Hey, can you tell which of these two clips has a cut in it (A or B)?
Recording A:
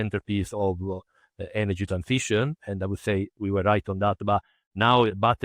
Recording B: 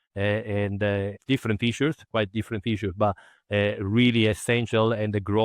B